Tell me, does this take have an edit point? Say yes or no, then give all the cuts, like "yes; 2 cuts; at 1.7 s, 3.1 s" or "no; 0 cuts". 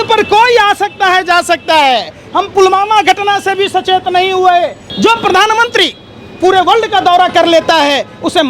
yes; 1 cut; at 4.8 s